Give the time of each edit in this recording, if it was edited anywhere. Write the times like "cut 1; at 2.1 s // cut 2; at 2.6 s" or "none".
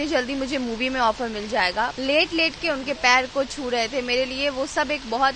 cut 1; at 2.0 s

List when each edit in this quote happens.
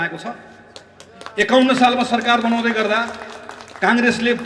none

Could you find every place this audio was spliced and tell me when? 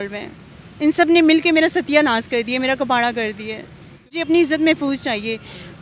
cut 1; at 4.2 s

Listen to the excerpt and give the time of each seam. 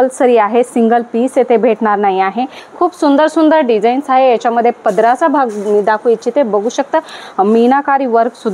cut 1; at 2.6 s // cut 2; at 7.2 s

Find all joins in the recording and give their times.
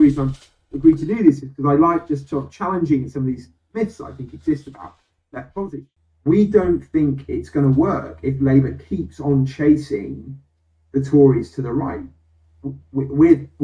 cut 1; at 5.7 s

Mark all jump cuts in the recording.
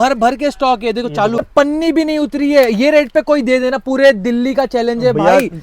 cut 1; at 1.4 s

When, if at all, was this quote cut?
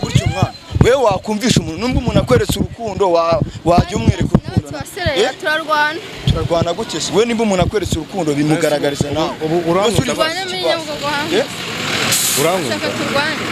none

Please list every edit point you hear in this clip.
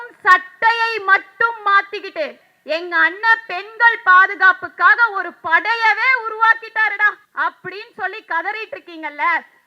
cut 1; at 2.5 s // cut 2; at 7.2 s

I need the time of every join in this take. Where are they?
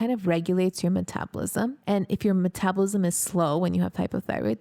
cut 1; at 1.8 s

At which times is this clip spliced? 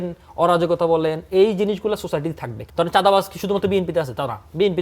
cut 1; at 2.6 s

